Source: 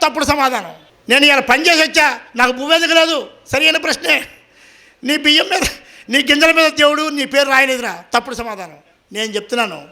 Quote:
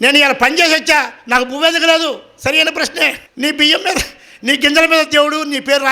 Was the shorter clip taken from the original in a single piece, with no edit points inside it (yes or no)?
no